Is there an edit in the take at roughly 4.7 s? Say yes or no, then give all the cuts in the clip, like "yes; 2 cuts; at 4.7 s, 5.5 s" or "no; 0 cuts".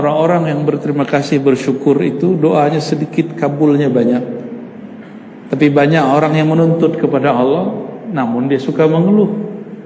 no; 0 cuts